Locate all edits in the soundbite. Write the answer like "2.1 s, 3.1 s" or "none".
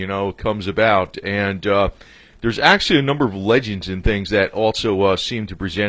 3.0 s

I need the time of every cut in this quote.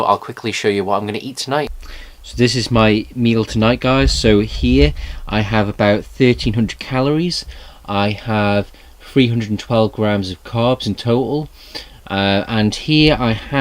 10.5 s

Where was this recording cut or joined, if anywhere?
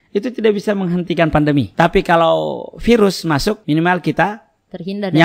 1.7 s, 3.6 s

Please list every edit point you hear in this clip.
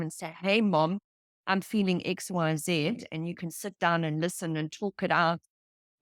none

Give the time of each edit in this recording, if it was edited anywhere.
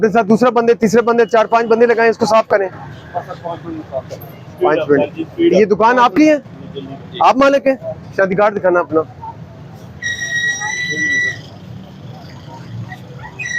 none

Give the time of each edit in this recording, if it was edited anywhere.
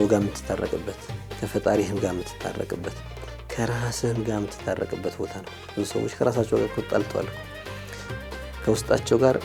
none

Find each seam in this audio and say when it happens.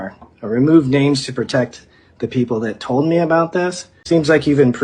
3.9 s

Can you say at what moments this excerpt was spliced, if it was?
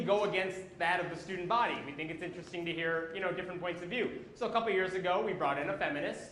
3.4 s

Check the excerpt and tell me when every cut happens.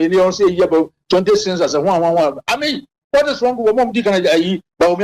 none

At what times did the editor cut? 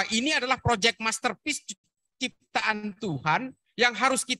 none

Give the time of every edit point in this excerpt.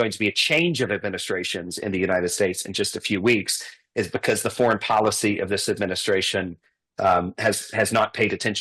none

